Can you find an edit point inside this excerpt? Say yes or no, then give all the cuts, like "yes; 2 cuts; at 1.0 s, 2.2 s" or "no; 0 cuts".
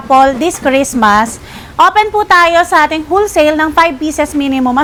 no; 0 cuts